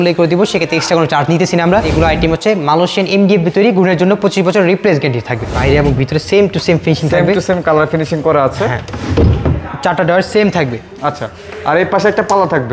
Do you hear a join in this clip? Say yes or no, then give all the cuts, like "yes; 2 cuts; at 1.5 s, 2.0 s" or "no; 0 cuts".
yes; 2 cuts; at 1.9 s, 5.5 s